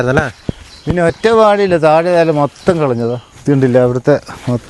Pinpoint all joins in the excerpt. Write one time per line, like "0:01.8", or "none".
0:03.3